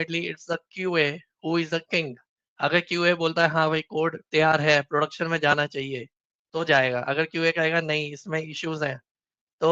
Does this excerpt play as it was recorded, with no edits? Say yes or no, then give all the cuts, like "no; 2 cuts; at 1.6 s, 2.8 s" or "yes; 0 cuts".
yes; 0 cuts